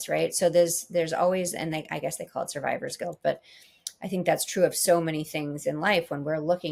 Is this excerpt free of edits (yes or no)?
yes